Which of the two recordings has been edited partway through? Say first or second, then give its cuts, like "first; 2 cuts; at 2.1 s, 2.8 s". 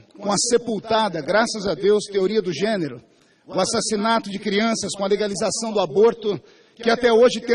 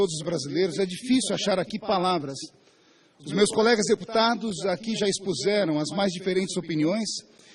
first; 1 cut; at 3.7 s